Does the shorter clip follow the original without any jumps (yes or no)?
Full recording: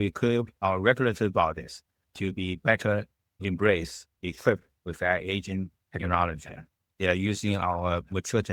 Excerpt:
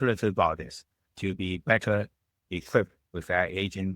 no